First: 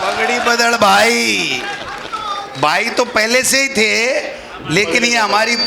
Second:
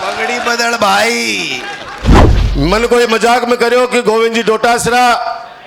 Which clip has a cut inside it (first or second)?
second